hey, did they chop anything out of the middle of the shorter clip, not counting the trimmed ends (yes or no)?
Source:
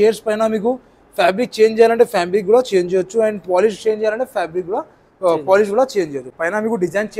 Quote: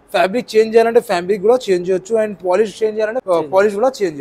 yes